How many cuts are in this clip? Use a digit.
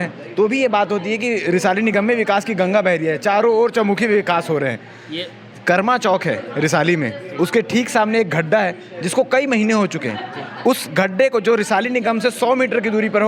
0